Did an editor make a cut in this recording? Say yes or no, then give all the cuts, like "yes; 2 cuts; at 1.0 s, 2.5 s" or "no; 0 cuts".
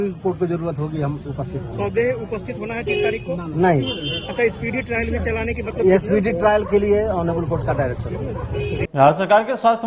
yes; 1 cut; at 8.9 s